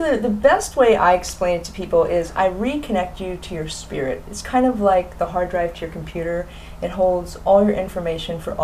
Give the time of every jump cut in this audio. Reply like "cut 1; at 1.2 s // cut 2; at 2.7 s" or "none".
cut 1; at 2.5 s